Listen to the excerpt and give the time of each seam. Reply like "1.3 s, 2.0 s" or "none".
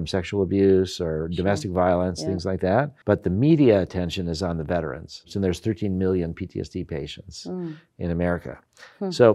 2.9 s, 5.2 s